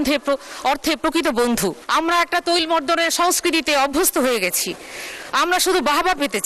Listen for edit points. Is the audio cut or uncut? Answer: cut